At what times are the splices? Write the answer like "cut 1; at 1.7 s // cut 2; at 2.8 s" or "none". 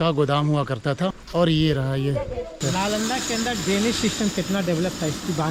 cut 1; at 1.2 s // cut 2; at 2.6 s